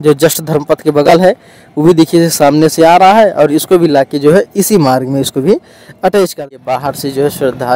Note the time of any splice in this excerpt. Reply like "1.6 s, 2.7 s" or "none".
6.4 s